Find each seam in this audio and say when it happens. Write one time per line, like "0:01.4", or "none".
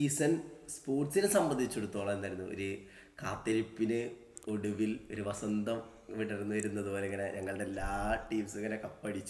none